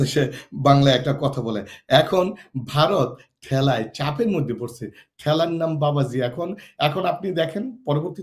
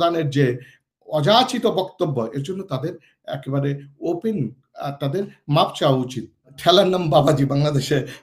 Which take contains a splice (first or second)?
second